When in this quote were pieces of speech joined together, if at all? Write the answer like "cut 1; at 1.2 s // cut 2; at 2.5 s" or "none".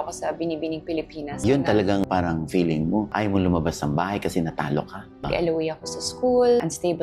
cut 1; at 1.4 s // cut 2; at 5.2 s

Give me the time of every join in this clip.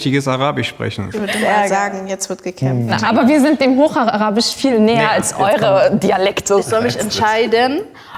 cut 1; at 1.0 s // cut 2; at 2.9 s // cut 3; at 6.6 s

